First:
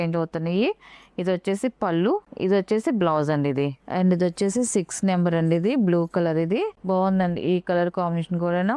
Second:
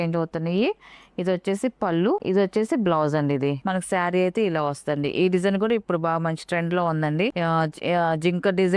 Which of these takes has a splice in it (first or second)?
second